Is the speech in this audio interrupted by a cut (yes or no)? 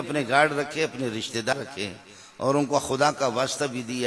yes